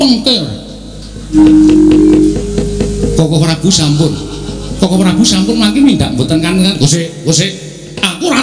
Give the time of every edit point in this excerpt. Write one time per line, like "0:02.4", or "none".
0:01.4